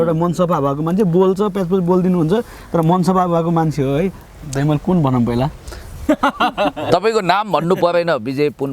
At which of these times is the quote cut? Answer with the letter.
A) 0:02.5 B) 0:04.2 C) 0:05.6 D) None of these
B